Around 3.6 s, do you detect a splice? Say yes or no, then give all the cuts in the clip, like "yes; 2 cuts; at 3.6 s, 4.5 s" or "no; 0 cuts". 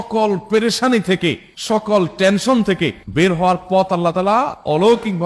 no; 0 cuts